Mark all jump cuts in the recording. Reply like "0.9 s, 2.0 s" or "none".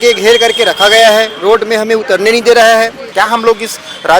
3.0 s